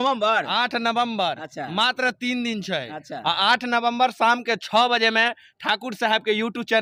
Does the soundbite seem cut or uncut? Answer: uncut